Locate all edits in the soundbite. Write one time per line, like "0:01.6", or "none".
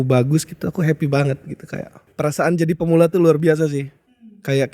0:02.0